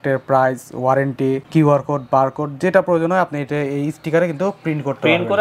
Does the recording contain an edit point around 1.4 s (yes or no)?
yes